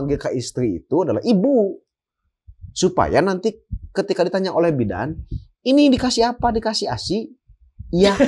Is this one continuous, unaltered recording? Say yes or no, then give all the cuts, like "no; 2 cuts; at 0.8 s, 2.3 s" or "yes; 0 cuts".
yes; 0 cuts